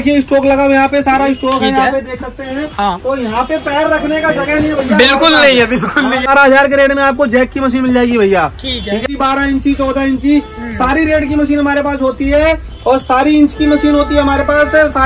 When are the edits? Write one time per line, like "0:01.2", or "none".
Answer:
0:06.3
0:09.0